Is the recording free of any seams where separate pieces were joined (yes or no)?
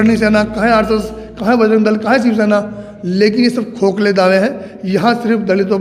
yes